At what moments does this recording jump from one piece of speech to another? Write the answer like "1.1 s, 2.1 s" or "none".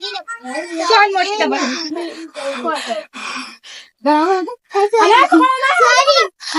none